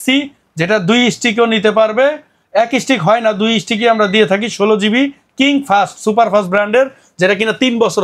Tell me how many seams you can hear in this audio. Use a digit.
0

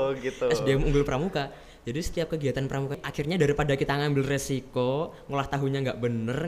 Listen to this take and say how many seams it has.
1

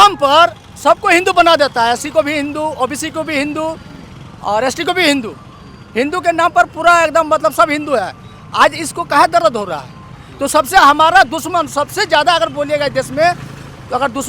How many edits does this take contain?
1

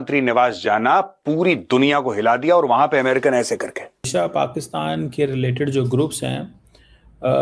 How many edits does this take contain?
1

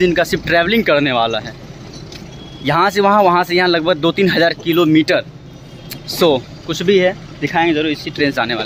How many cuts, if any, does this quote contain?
0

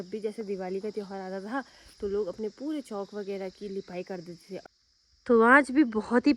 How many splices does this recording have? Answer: 1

